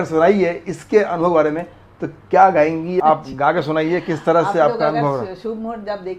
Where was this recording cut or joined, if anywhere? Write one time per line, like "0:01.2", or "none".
0:03.0